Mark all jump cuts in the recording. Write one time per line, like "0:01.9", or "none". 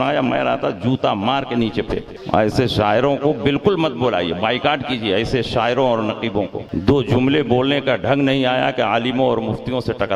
0:02.1
0:06.6